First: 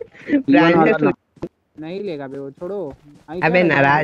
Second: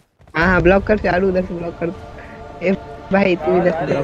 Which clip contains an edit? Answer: first; 1 cut; at 1.3 s

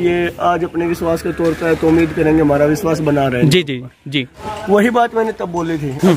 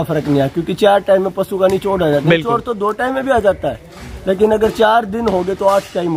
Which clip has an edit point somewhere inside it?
first; 1 cut; at 4.4 s

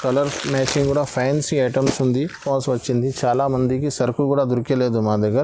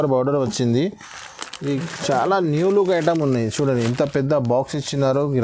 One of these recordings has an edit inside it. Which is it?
first; 1 cut; at 2.4 s

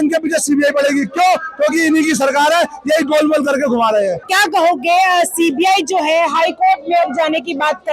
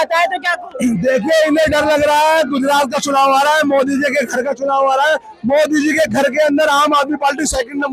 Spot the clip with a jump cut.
first; 1 cut; at 4.2 s

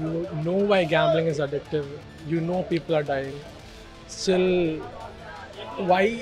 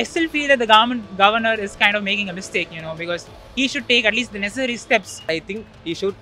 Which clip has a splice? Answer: second; 1 cut; at 5.2 s

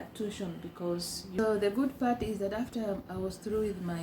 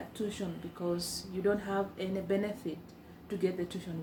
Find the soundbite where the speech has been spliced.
first; 1 cut; at 1.4 s

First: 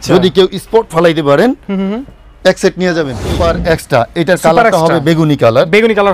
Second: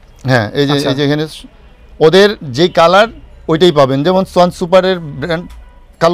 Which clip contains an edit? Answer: first; 1 cut; at 3.2 s

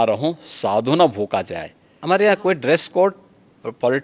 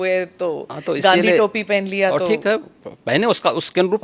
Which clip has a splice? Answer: first; 1 cut; at 2.0 s

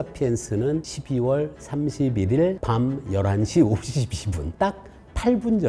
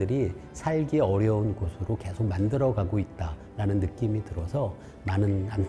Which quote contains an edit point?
first; 3 cuts; at 0.9 s, 2.6 s, 4.4 s

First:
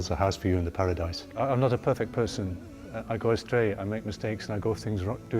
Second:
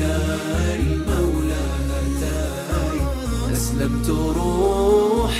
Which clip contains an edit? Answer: first; 1 cut; at 1.2 s

